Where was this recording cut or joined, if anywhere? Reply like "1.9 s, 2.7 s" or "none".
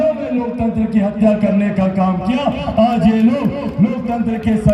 none